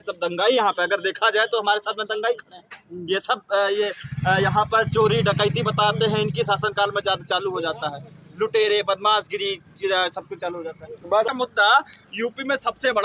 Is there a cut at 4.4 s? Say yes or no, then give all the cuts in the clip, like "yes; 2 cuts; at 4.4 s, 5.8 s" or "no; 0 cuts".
no; 1 cut; at 11.3 s